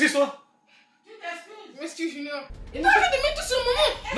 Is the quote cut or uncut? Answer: cut